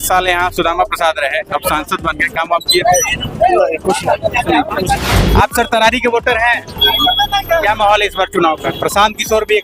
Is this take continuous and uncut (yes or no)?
no